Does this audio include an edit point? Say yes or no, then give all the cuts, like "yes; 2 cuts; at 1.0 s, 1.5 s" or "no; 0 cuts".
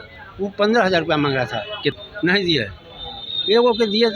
yes; 1 cut; at 2.0 s